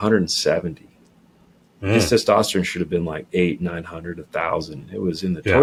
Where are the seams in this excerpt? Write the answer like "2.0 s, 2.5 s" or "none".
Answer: none